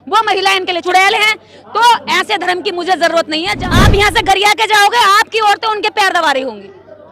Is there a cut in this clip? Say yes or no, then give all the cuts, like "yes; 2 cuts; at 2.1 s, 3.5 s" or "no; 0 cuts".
yes; 2 cuts; at 0.8 s, 3.5 s